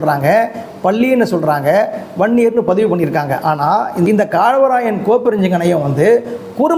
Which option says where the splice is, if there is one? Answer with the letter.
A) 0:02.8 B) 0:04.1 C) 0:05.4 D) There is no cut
B